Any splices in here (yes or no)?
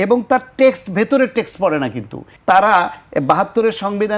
yes